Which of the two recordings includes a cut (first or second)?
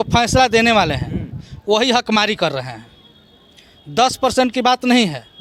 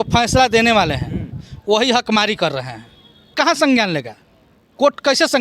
second